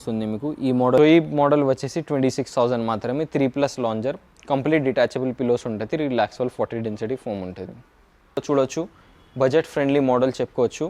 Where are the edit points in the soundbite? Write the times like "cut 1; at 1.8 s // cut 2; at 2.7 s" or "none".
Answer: cut 1; at 1.0 s // cut 2; at 8.4 s